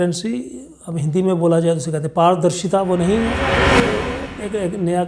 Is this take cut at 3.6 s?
yes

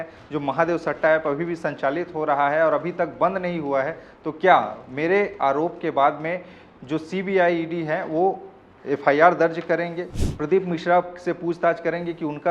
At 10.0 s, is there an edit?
yes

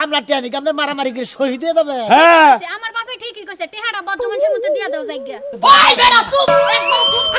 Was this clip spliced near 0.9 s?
no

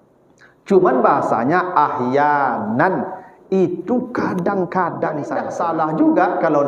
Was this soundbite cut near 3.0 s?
no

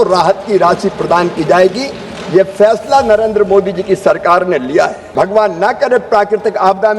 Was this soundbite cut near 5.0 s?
yes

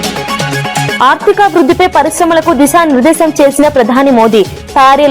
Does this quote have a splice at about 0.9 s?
yes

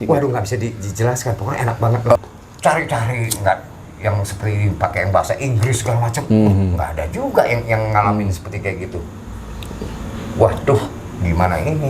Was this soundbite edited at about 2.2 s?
yes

